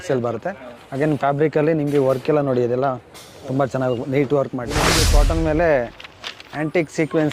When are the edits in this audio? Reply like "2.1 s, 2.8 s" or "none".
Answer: 4.9 s